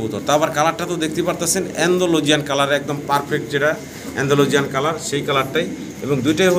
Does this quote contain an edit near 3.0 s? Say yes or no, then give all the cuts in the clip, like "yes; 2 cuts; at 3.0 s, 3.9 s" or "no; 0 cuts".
no; 0 cuts